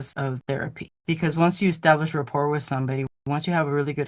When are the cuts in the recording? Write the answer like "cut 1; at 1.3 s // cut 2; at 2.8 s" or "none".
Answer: none